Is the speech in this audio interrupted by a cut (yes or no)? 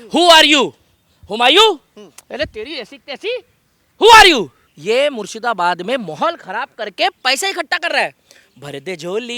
yes